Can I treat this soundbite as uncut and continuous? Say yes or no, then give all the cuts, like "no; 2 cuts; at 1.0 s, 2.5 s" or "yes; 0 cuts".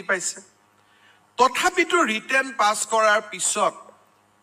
yes; 0 cuts